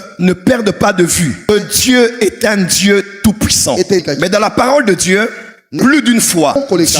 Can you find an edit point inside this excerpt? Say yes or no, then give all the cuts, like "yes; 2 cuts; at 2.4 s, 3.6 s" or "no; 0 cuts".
yes; 2 cuts; at 1.5 s, 4.0 s